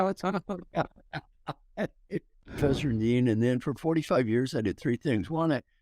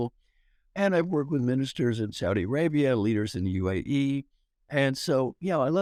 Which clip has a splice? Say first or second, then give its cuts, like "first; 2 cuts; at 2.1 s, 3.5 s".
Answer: first; 1 cut; at 2.5 s